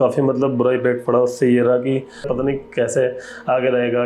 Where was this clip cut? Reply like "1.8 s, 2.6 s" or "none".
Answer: 2.3 s